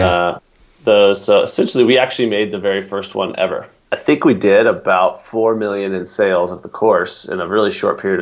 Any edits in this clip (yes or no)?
yes